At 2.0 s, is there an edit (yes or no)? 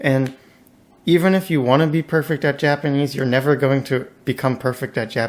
no